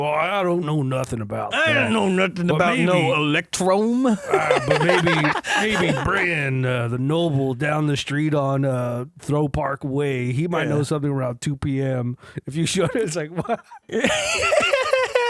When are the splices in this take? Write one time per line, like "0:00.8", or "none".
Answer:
0:09.1